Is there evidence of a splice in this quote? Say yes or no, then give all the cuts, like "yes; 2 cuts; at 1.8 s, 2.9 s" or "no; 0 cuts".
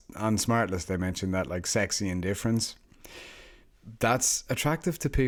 no; 0 cuts